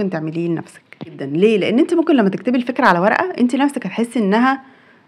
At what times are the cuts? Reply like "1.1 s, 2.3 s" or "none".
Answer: 1.2 s